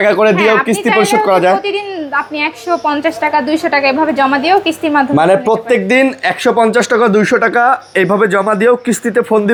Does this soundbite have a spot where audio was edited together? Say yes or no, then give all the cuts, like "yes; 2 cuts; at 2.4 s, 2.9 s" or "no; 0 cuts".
no; 0 cuts